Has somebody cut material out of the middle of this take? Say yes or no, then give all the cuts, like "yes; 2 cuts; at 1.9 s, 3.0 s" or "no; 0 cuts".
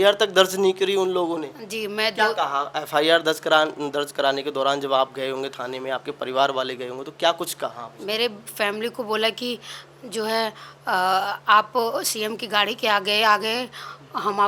no; 0 cuts